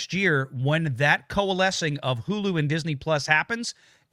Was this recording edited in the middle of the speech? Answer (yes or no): no